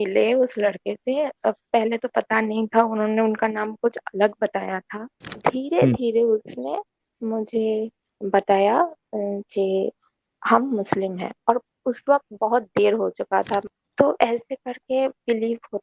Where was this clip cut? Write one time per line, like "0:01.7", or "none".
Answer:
0:05.4
0:13.6